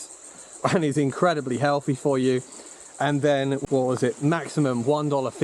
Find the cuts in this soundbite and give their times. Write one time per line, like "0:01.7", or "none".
0:03.6